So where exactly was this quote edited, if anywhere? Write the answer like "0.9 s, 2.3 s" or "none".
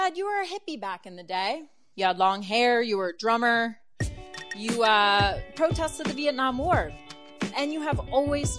1.8 s, 7.5 s